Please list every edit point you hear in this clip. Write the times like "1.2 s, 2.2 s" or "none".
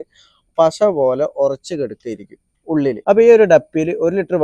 3.0 s